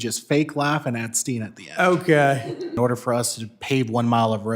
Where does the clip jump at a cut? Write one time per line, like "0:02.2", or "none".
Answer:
0:02.7